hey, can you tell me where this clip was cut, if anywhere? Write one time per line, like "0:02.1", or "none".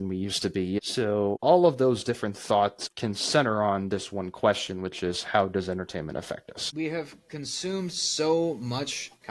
0:00.8
0:02.8
0:06.6